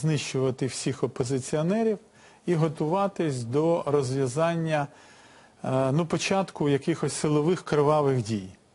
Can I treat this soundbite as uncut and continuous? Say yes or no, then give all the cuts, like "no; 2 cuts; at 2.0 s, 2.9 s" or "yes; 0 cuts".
no; 1 cut; at 7.4 s